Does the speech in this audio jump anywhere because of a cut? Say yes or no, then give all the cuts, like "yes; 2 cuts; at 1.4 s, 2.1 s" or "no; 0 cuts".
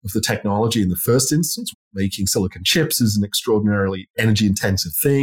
yes; 1 cut; at 1.6 s